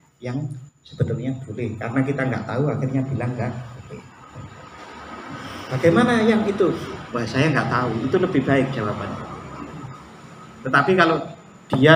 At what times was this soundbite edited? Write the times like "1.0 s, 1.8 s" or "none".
none